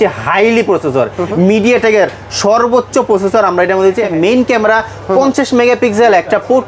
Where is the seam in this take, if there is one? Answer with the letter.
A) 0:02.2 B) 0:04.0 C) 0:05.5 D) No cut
B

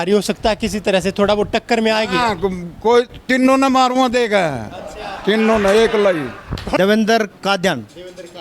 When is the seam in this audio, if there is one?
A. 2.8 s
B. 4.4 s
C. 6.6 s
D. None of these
C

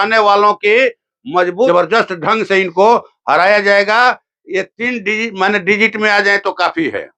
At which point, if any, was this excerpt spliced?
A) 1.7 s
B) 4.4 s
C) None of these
A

